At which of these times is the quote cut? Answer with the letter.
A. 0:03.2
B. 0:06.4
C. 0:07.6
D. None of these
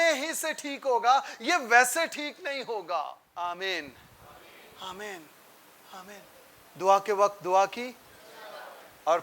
A